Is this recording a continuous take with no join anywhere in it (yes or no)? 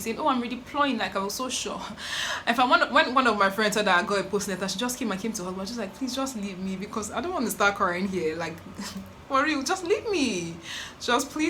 yes